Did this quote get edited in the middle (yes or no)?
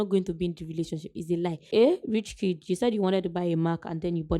yes